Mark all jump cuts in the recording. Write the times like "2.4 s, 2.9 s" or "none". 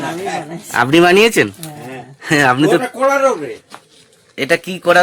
none